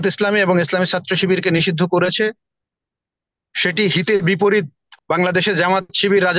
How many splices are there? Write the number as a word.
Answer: one